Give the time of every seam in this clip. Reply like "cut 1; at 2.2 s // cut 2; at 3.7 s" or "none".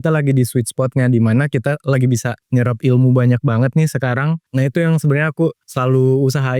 cut 1; at 2.4 s // cut 2; at 4.4 s // cut 3; at 5.7 s

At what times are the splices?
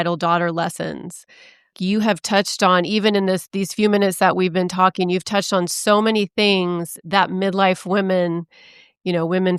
none

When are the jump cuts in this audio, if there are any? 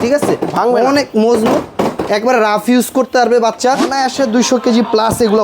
cut 1; at 3.9 s

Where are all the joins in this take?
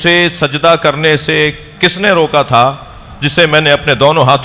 none

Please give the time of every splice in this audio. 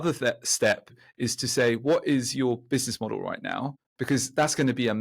cut 1; at 0.9 s

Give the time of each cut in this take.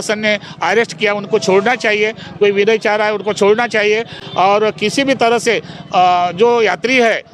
none

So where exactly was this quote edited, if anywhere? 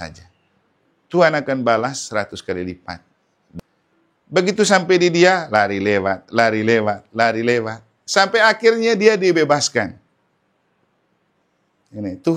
cut 1; at 3.3 s

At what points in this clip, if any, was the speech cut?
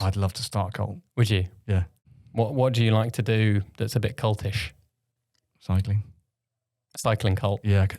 cut 1; at 2.0 s

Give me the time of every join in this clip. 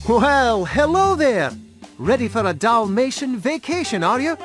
none

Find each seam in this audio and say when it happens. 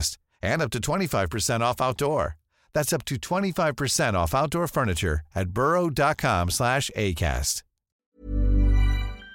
cut 1; at 8.0 s

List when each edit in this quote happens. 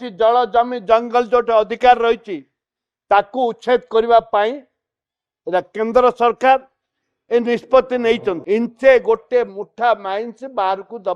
cut 1; at 8.3 s

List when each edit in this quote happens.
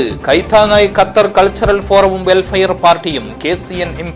none

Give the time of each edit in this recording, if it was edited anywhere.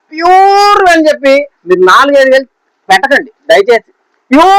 none

